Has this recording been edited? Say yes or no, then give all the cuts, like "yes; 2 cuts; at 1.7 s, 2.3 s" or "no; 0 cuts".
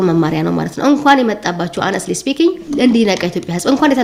no; 0 cuts